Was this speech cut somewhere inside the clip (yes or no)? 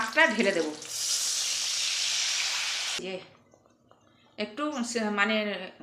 yes